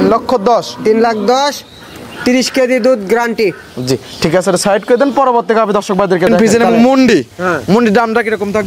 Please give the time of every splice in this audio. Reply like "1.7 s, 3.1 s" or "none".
6.3 s